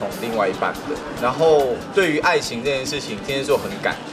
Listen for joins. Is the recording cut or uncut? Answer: uncut